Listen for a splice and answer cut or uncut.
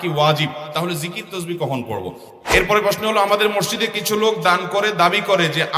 cut